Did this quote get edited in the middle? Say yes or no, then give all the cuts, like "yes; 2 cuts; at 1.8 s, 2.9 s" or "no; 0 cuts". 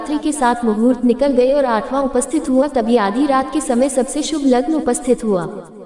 no; 0 cuts